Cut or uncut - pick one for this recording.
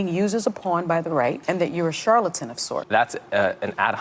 cut